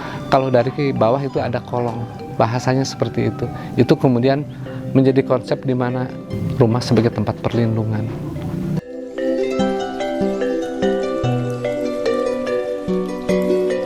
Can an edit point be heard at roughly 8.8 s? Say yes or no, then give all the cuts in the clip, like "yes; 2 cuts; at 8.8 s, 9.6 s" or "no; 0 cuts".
no; 0 cuts